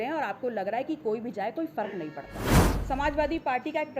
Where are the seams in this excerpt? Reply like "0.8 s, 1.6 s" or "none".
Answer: 2.6 s